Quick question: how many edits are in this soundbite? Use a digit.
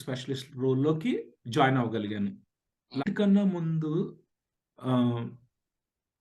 1